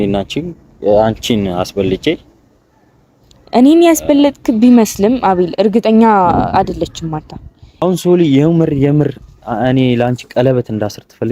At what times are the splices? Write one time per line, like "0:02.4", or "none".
0:07.8